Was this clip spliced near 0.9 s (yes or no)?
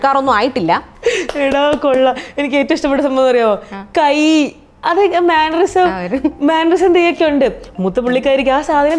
yes